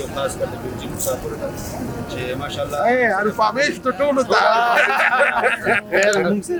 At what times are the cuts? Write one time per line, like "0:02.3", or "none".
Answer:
none